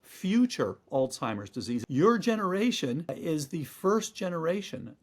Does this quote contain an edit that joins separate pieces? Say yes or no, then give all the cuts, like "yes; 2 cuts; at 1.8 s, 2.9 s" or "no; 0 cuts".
yes; 2 cuts; at 1.8 s, 3.1 s